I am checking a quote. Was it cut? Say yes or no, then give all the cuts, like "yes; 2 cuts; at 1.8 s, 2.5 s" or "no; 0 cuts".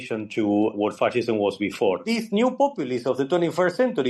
yes; 1 cut; at 2.0 s